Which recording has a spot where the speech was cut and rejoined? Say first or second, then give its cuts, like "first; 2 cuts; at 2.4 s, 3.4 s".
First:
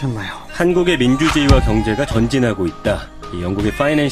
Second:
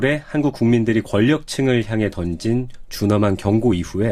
second; 1 cut; at 1.4 s